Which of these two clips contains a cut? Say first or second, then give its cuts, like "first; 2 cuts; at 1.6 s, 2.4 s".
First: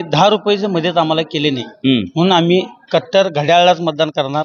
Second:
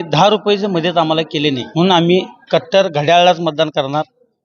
second; 1 cut; at 1.7 s